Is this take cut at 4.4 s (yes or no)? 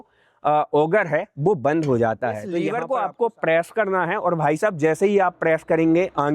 no